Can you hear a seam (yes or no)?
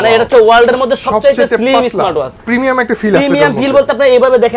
yes